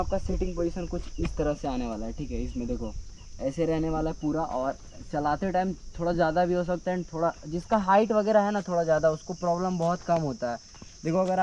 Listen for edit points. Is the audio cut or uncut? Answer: uncut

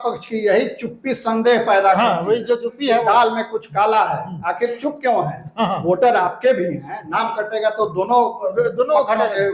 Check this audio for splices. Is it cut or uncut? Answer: uncut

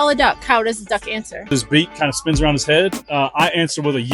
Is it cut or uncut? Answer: cut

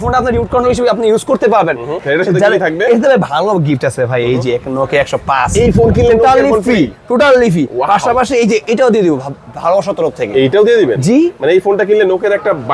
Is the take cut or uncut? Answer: cut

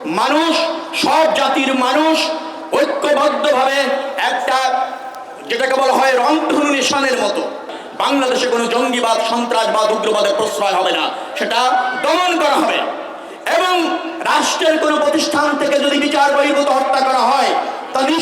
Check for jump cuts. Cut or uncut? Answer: cut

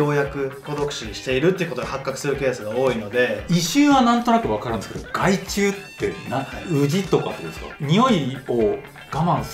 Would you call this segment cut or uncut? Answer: cut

